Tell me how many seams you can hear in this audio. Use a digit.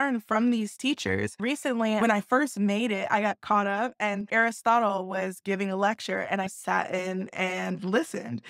1